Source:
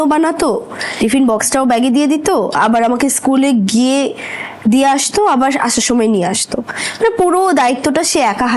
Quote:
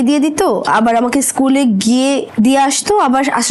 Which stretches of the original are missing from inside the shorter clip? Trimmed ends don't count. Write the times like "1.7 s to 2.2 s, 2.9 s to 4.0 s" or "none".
4.1 s to 4.5 s

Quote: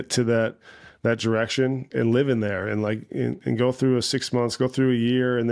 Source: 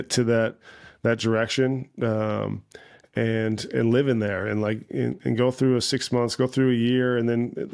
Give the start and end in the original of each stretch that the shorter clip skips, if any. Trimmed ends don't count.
1.9 s to 3.7 s

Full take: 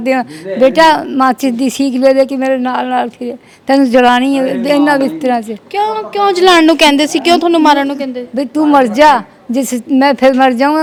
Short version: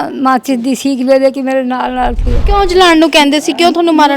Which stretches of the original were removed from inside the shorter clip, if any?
3.3 s to 6.0 s

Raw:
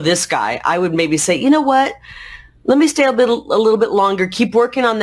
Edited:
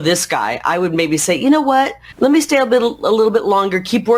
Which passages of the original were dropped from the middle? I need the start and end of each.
2.0 s to 2.5 s

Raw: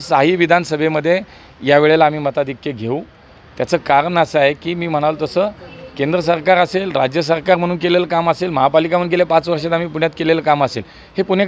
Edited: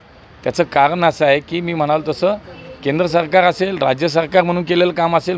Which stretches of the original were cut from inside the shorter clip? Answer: none

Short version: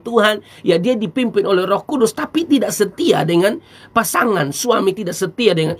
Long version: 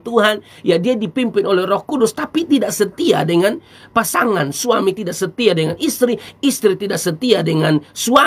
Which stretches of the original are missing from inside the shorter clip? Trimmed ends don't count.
none

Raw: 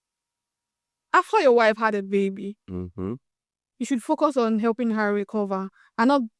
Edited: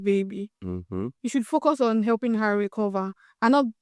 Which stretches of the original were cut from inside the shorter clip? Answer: 3.2 s to 3.7 s

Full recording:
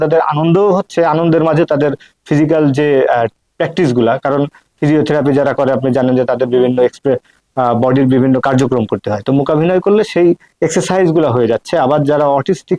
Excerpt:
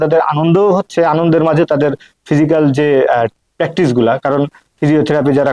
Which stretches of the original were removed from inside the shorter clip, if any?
none

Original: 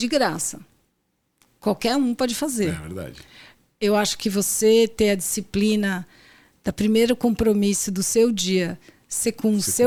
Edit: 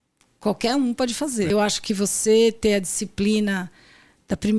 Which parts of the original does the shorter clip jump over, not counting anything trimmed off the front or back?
2.7 s to 3.9 s

